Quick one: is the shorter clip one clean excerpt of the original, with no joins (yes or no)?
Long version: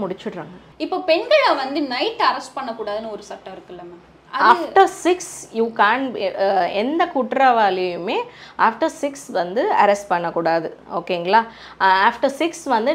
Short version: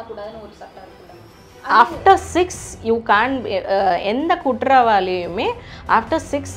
yes